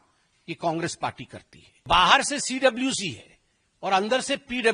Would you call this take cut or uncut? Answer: cut